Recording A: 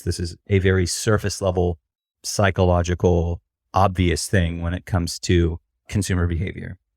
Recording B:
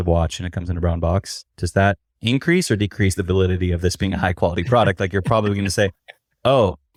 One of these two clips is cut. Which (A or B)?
A